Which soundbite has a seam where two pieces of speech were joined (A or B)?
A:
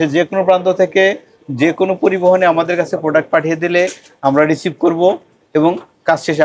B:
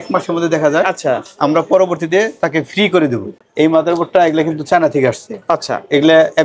B